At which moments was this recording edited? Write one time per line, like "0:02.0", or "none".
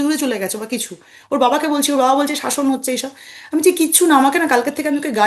none